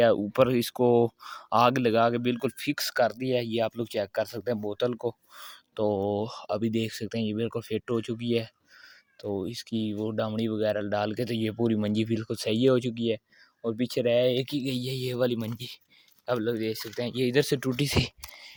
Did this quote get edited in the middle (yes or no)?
no